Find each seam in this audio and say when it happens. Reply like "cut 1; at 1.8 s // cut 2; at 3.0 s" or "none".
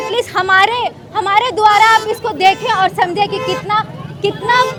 none